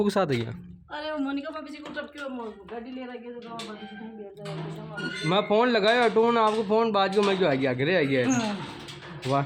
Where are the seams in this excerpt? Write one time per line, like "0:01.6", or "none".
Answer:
none